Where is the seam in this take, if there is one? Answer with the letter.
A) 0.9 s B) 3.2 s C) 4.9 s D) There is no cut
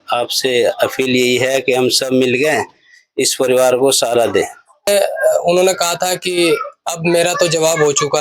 C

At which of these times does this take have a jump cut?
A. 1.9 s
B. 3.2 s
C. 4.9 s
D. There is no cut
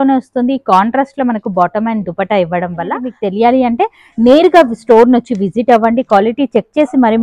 B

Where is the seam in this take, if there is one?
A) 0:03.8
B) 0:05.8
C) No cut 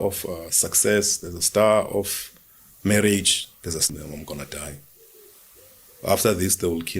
A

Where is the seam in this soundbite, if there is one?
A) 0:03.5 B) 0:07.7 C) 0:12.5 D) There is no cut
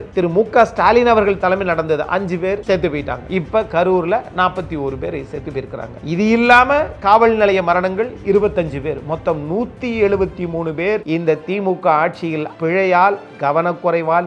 C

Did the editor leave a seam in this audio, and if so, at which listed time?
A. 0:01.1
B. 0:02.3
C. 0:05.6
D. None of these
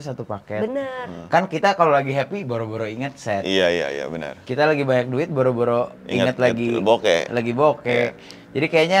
D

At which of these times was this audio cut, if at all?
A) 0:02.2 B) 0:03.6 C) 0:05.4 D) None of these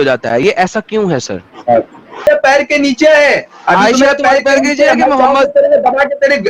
A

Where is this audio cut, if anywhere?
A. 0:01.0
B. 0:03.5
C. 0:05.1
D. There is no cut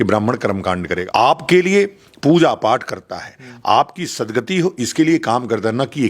A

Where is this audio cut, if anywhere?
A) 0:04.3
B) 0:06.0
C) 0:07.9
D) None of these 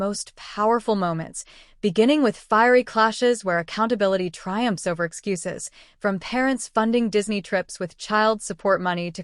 C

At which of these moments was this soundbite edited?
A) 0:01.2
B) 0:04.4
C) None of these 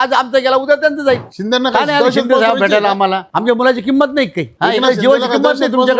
A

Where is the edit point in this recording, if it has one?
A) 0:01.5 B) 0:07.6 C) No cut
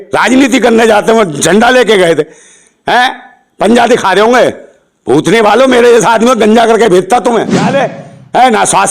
B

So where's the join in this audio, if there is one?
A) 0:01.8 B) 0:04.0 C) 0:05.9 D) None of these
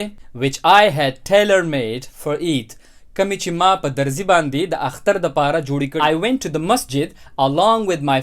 C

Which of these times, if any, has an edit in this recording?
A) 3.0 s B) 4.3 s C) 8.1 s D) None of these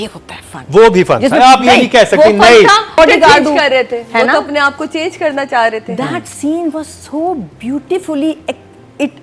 A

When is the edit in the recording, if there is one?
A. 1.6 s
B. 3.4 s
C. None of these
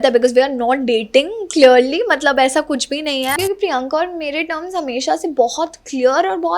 B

